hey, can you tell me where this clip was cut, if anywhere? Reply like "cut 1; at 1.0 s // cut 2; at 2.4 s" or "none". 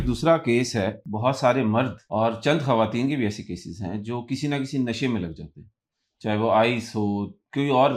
cut 1; at 1.0 s // cut 2; at 2.0 s